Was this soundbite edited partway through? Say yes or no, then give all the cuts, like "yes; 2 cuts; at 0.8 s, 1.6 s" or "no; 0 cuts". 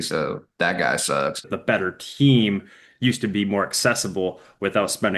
yes; 1 cut; at 1.5 s